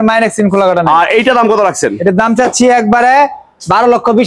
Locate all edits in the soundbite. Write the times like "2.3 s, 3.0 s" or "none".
none